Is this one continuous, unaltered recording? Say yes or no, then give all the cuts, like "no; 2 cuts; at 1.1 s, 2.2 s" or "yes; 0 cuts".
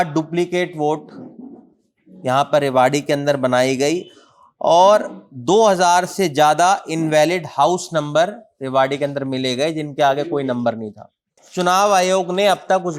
no; 1 cut; at 11.4 s